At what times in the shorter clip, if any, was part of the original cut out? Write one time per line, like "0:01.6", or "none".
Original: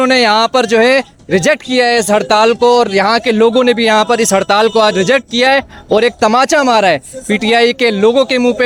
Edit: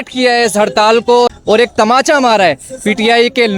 0:01.3